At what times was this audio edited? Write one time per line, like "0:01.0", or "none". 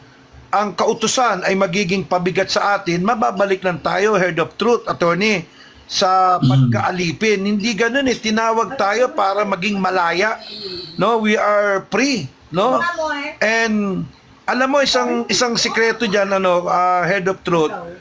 none